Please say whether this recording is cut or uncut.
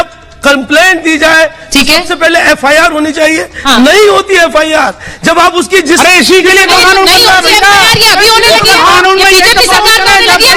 uncut